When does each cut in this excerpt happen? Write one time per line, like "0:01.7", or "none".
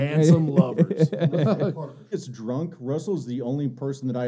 0:02.1